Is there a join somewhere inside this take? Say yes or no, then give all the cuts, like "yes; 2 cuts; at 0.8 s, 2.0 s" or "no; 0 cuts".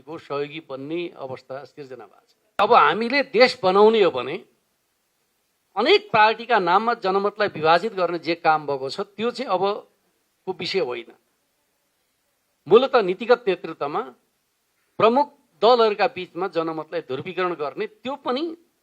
yes; 1 cut; at 2.6 s